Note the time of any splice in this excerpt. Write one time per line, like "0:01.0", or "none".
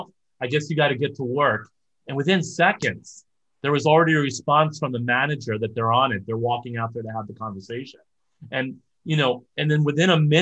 none